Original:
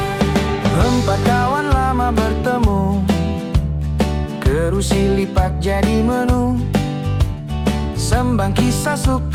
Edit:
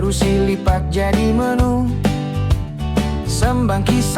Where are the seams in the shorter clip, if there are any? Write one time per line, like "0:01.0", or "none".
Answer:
none